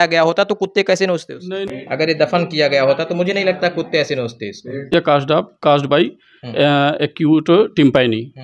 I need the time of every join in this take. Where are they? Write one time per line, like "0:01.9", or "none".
0:01.7
0:04.9